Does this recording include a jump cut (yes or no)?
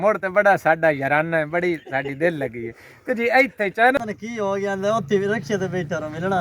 yes